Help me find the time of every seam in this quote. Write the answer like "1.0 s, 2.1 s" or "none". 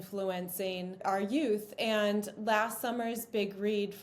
1.0 s